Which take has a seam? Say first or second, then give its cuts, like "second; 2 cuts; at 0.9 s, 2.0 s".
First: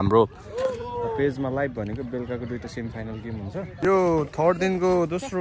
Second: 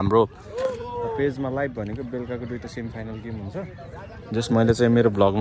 first; 1 cut; at 3.7 s